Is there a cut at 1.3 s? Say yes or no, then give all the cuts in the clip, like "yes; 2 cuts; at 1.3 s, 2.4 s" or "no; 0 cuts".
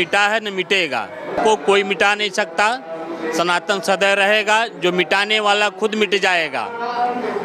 yes; 1 cut; at 1.3 s